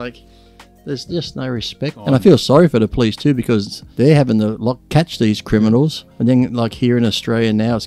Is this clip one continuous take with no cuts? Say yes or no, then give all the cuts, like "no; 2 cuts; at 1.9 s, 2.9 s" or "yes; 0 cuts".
no; 4 cuts; at 2.0 s, 3.8 s, 4.8 s, 6.0 s